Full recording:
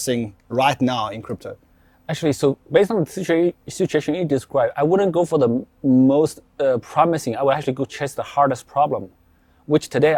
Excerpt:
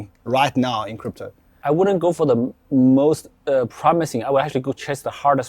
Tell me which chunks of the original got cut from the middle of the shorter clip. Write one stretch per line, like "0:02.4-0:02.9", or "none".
0:01.9-0:04.7